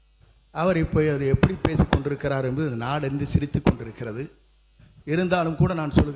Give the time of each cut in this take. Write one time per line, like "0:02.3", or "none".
none